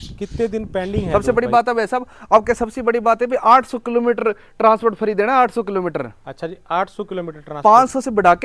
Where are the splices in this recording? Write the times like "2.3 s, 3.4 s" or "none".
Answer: 1.1 s